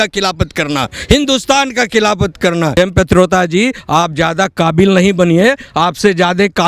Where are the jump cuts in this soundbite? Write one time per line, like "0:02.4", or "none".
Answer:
0:02.8